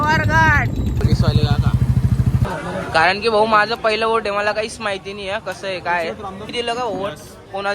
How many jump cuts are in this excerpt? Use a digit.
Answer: 3